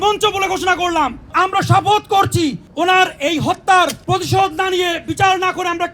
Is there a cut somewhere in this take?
yes; 3 cuts; at 1.3 s, 2.6 s, 4.0 s

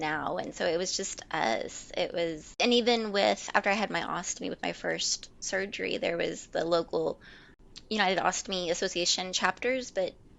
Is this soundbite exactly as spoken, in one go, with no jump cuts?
yes; 0 cuts

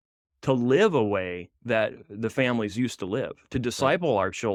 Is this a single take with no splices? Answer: yes; 0 cuts

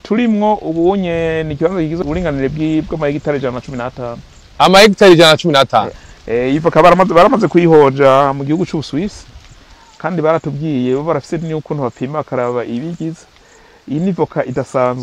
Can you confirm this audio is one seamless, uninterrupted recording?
no; 1 cut; at 6.0 s

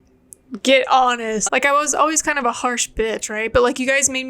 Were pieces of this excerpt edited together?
yes; 1 cut; at 1.4 s

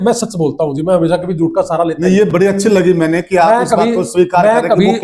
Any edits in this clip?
no; 0 cuts

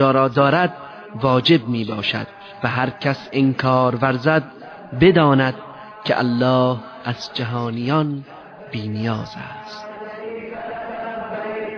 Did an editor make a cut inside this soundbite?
no; 0 cuts

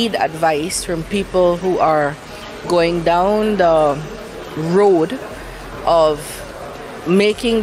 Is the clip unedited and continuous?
yes; 0 cuts

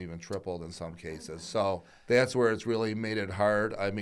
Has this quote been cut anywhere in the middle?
no; 0 cuts

